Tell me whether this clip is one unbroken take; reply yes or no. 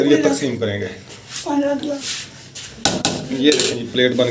no